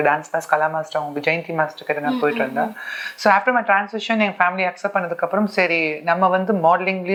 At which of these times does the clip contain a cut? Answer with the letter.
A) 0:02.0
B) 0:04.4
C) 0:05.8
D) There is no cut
D